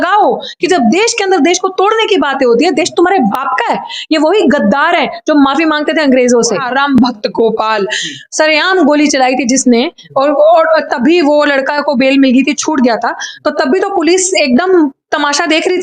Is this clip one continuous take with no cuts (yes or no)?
no